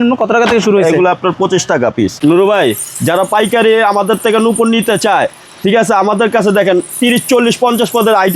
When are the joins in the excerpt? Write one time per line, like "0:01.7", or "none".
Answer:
0:02.2